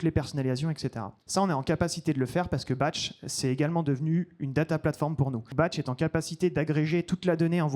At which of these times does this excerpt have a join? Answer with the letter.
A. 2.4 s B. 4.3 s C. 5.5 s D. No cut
C